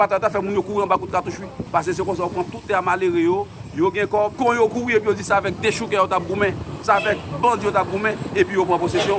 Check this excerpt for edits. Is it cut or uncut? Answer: cut